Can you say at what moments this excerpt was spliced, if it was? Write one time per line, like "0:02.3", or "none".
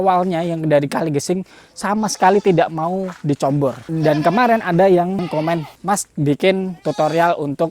0:03.8